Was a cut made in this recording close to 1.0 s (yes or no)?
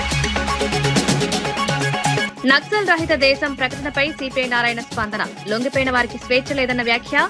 no